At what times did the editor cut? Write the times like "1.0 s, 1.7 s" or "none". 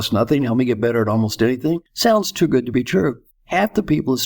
1.9 s, 3.3 s